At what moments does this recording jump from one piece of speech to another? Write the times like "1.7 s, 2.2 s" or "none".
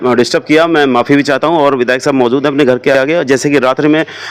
none